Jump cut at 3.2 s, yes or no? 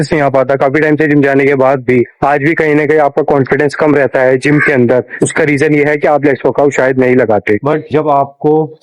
no